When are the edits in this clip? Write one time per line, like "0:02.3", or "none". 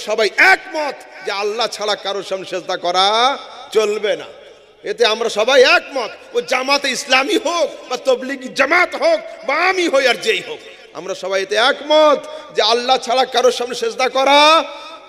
none